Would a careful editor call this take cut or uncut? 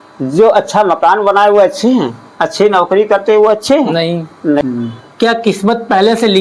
cut